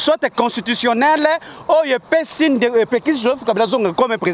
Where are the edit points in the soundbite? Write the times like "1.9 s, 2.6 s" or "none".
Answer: none